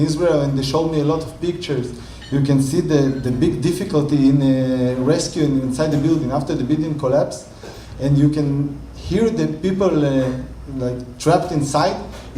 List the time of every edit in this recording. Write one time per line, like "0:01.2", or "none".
0:02.2